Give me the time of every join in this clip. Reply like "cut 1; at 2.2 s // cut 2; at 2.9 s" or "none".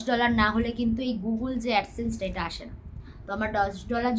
none